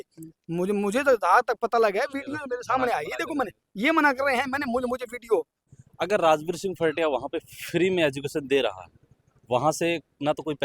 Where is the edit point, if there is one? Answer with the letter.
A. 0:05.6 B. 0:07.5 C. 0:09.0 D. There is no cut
A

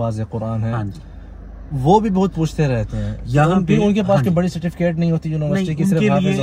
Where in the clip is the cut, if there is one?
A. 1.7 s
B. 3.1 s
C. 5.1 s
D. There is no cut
D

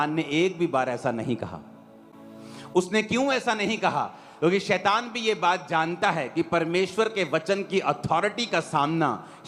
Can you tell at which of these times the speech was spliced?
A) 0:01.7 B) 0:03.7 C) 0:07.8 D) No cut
D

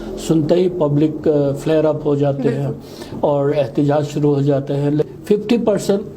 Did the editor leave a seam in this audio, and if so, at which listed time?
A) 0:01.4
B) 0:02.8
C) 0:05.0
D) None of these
C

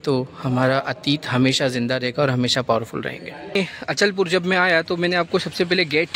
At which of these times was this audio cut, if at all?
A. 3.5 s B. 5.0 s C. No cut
A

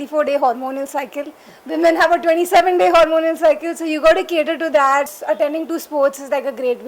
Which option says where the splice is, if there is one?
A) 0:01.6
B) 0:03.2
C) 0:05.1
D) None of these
C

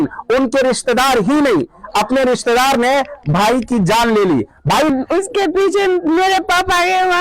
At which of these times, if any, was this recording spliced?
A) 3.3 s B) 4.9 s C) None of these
B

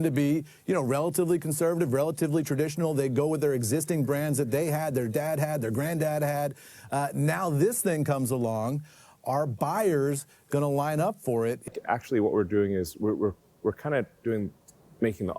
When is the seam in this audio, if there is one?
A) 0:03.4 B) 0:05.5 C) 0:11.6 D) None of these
C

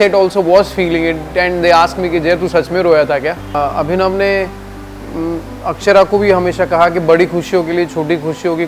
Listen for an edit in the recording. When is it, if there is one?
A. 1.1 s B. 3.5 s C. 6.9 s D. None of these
B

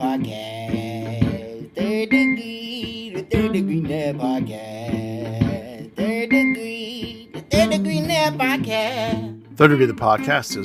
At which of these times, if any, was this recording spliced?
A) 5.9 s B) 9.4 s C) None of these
B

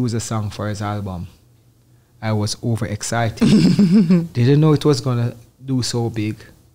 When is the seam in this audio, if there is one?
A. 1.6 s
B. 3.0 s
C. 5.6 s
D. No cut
D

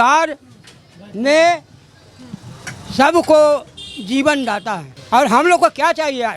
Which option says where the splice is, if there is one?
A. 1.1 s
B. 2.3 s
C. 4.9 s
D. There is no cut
C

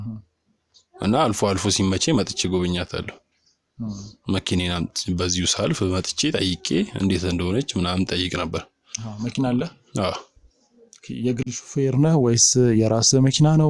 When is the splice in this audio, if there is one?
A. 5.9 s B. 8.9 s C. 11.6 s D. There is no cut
D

